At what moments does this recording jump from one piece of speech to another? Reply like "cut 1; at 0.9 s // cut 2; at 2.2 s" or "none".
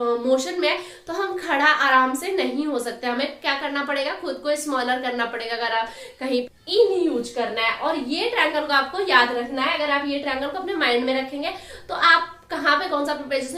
cut 1; at 6.5 s